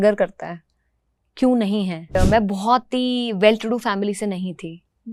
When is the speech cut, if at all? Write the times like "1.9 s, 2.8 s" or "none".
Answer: 2.1 s